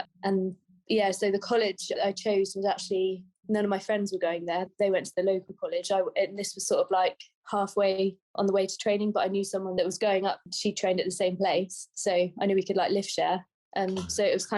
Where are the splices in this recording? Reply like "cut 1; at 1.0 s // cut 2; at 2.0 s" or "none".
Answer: cut 1; at 2.0 s // cut 2; at 4.7 s // cut 3; at 9.7 s